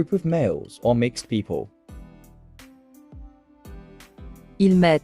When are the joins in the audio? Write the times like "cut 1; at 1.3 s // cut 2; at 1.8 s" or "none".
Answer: cut 1; at 1.7 s // cut 2; at 4.0 s